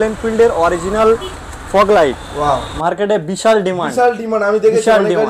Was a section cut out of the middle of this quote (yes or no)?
yes